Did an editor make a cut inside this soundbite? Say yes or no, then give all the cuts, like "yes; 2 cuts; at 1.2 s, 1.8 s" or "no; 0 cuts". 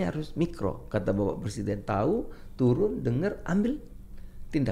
no; 0 cuts